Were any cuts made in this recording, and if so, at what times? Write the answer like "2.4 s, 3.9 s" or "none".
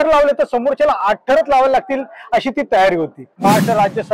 3.2 s